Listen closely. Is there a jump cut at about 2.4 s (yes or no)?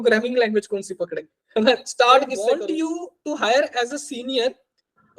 yes